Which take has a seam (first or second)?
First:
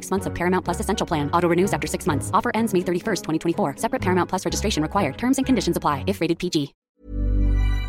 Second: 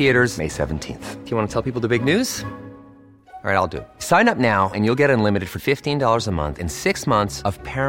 first